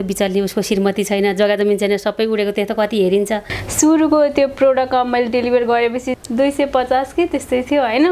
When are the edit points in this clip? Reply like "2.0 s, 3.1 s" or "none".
3.6 s, 6.1 s